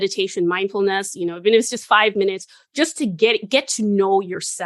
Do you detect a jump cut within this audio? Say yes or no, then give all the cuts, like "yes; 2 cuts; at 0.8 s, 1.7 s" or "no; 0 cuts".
no; 0 cuts